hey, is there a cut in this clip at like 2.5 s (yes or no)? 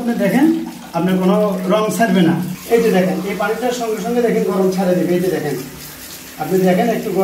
yes